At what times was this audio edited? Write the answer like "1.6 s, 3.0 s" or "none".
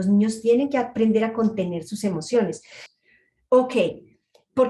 2.8 s